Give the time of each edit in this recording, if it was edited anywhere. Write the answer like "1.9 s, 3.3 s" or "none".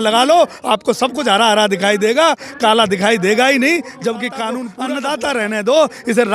4.7 s